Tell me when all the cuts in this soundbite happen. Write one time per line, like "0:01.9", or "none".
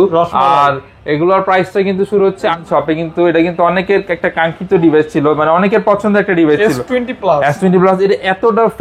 0:02.6